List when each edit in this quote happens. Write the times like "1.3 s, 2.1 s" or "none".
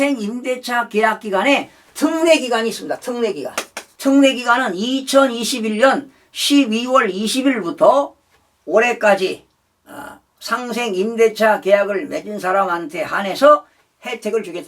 3.9 s